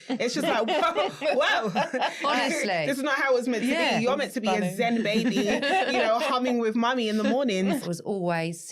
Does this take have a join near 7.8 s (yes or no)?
yes